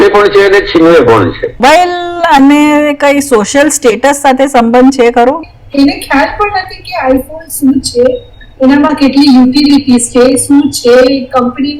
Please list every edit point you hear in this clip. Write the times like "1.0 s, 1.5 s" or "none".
1.6 s, 5.4 s

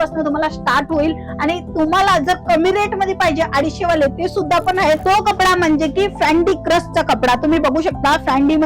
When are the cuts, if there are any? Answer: 5.0 s

